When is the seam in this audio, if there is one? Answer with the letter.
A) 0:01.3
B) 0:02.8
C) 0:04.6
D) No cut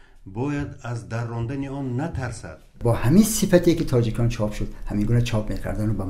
B